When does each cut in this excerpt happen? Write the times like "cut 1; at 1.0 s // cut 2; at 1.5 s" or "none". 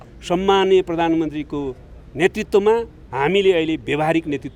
none